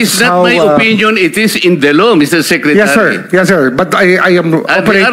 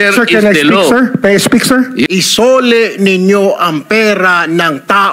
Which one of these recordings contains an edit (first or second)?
second